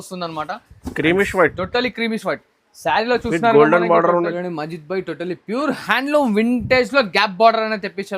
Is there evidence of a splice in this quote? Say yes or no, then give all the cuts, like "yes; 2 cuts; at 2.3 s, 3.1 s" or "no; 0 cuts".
yes; 1 cut; at 4.3 s